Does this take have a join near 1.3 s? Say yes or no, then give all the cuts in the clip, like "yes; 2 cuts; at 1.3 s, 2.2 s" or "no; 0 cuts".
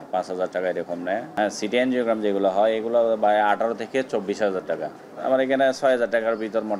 no; 0 cuts